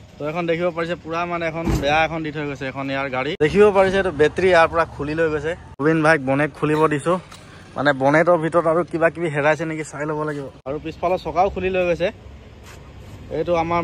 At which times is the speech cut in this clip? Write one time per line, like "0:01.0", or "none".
0:03.4
0:05.6
0:10.5